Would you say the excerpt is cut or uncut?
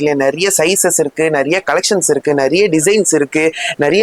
uncut